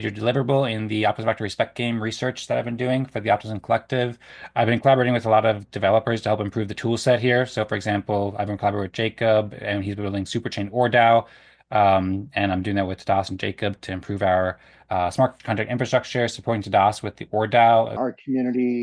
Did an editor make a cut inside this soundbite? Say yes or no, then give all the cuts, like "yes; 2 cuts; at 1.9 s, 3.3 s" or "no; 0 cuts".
yes; 3 cuts; at 4.3 s, 15.4 s, 18.0 s